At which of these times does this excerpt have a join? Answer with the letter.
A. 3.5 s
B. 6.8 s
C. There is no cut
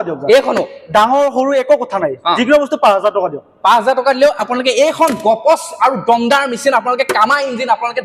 C